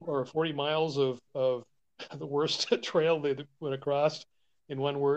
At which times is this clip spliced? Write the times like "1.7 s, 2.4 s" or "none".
none